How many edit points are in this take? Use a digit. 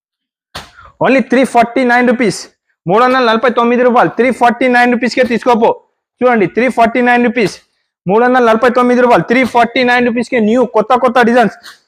0